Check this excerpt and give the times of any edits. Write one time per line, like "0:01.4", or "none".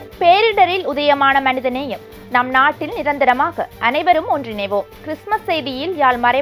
none